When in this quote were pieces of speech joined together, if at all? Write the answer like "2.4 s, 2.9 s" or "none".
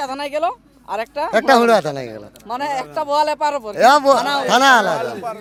none